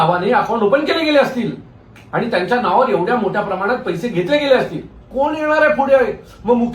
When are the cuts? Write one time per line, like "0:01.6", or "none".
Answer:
0:05.1

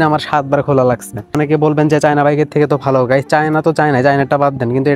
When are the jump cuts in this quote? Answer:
0:01.4

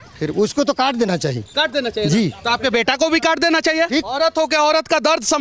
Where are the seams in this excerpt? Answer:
0:04.1

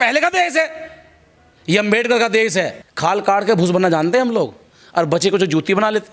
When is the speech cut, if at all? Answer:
0:02.8

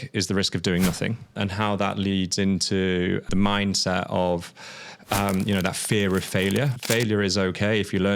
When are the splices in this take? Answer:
0:01.4
0:03.3
0:06.8

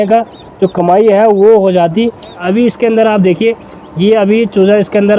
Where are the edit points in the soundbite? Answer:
0:02.4

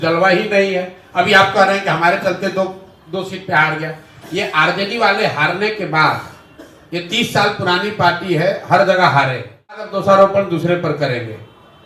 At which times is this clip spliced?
0:09.9

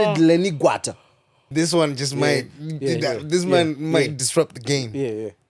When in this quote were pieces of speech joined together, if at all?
0:01.4

